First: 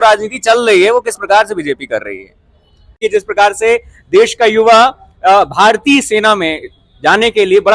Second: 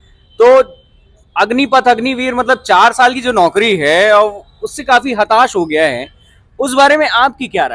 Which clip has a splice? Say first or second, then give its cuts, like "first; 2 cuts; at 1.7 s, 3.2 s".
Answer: first; 1 cut; at 3.0 s